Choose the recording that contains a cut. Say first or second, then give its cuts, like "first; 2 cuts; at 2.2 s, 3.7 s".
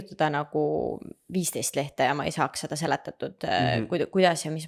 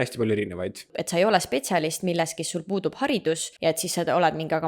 second; 2 cuts; at 0.9 s, 3.5 s